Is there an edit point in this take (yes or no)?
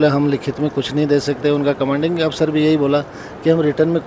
no